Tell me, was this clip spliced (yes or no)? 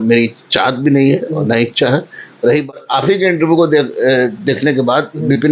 yes